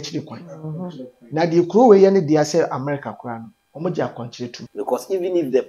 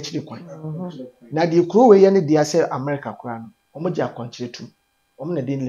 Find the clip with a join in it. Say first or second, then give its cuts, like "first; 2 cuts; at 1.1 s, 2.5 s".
first; 1 cut; at 4.6 s